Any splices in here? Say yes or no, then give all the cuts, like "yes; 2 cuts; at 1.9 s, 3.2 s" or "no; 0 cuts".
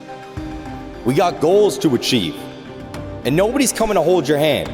yes; 1 cut; at 1.0 s